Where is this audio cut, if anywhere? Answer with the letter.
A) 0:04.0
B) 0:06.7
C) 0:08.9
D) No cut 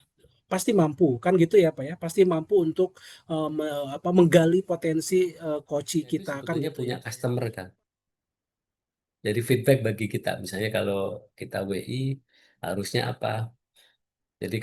B